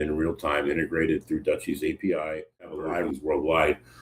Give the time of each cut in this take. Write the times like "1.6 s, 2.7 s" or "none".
2.8 s